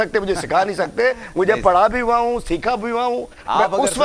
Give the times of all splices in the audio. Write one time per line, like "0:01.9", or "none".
none